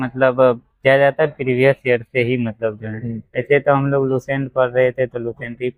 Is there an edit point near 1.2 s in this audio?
no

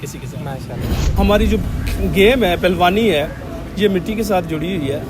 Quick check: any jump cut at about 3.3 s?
no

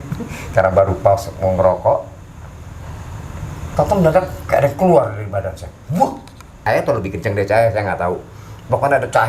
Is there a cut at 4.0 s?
no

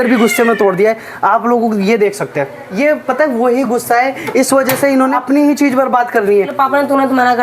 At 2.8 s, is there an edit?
yes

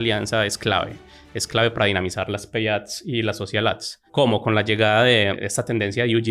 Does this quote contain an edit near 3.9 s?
yes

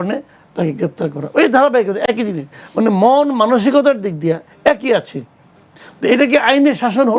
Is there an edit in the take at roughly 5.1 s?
no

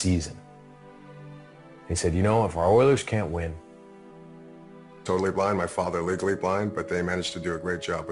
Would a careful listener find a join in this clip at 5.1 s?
no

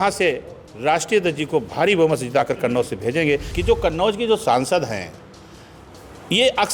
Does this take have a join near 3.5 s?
yes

